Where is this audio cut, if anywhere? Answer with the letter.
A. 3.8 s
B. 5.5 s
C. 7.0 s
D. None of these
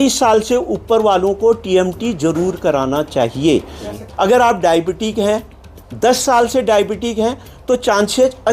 A